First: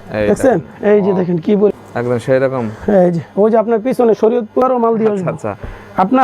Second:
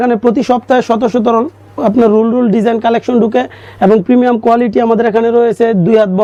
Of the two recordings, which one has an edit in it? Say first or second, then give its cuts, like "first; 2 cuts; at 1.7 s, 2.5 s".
first; 2 cuts; at 1.7 s, 4.6 s